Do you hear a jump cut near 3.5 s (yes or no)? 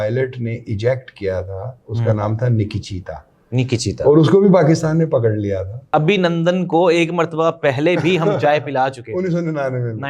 no